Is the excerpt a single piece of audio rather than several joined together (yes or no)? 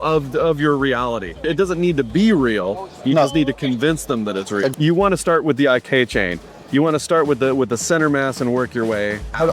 no